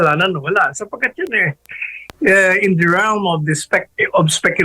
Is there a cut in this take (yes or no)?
no